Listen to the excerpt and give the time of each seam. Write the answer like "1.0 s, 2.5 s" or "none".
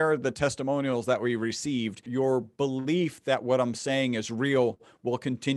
2.1 s